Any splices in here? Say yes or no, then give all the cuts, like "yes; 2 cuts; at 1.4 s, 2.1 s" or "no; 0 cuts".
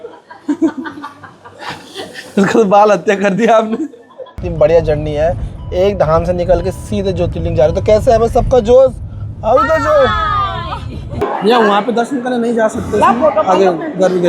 yes; 2 cuts; at 4.4 s, 11.1 s